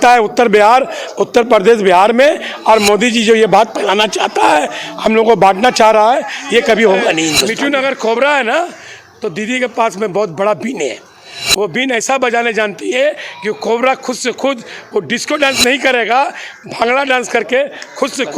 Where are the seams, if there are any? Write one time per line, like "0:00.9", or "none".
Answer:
0:07.5